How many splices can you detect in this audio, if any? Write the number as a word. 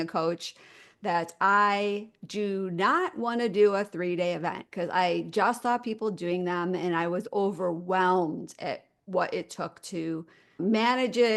one